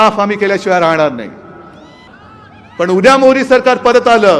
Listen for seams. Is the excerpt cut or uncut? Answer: cut